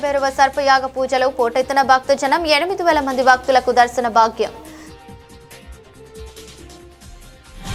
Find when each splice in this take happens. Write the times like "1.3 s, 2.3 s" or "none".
none